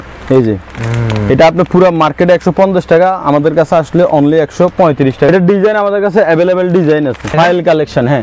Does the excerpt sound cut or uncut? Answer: cut